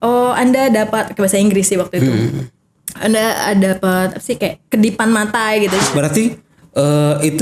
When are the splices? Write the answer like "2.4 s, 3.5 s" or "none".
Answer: 5.8 s

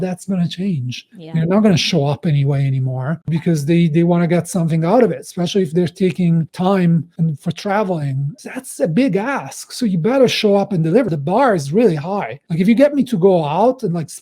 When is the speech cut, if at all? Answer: 8.3 s, 11.2 s

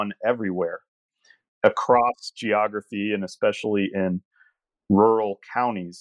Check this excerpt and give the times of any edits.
none

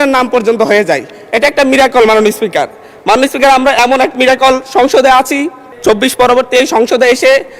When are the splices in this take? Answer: 5.7 s

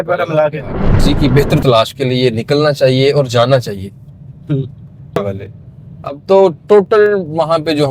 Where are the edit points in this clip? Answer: 1.0 s, 5.2 s

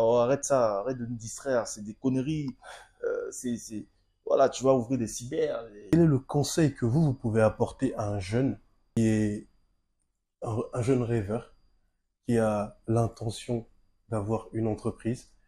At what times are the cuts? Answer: 5.8 s, 9.0 s

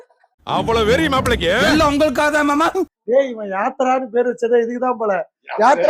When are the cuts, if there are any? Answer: 2.9 s

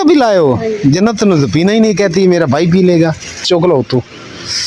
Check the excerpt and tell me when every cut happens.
3.4 s

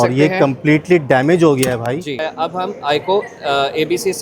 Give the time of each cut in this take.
2.3 s

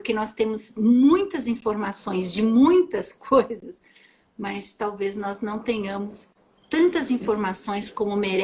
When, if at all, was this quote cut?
none

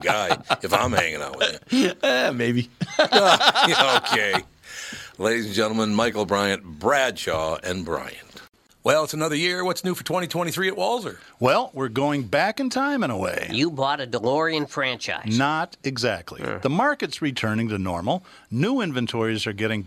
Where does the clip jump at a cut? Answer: 8.4 s

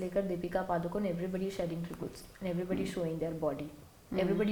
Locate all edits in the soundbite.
none

